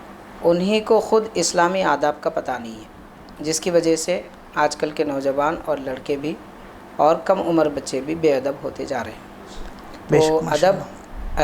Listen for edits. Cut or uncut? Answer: uncut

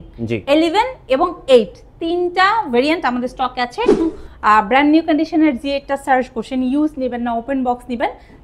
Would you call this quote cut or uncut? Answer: cut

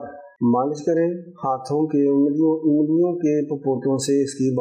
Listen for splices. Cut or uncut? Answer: uncut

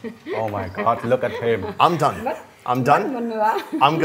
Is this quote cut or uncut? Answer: uncut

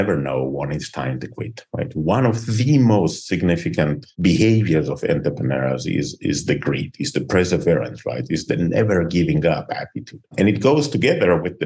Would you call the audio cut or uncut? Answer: uncut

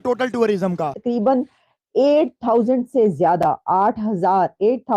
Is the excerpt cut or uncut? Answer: cut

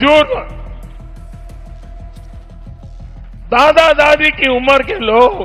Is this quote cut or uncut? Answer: cut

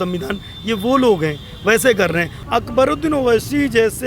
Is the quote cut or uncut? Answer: cut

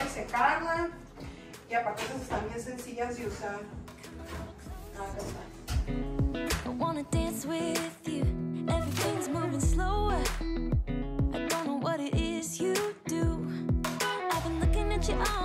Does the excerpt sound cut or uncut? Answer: uncut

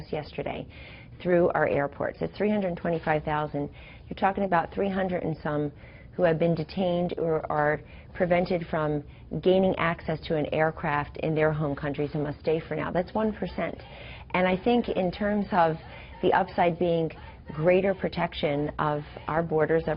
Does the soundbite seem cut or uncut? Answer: uncut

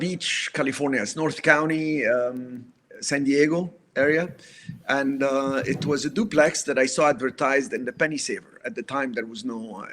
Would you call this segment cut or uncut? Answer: uncut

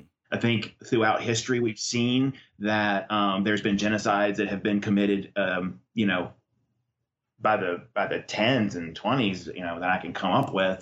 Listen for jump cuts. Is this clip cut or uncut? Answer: uncut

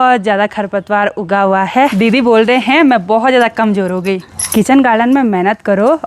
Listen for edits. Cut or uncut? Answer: cut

